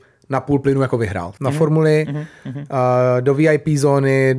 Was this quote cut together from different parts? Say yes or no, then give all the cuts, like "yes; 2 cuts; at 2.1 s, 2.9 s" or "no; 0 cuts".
yes; 1 cut; at 1.3 s